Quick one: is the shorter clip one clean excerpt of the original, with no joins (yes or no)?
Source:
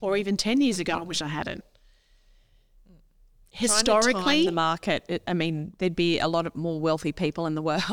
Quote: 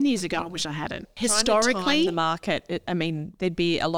no